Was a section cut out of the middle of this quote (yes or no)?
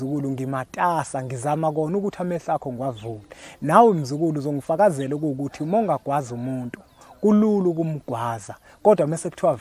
no